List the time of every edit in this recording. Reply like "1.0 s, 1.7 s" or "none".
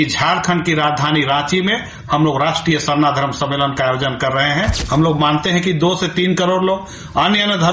4.8 s